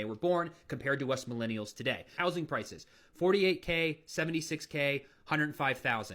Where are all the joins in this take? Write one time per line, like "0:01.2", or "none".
0:02.2